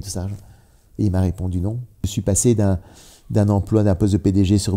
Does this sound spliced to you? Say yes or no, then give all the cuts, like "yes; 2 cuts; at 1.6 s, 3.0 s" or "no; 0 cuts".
yes; 1 cut; at 2.1 s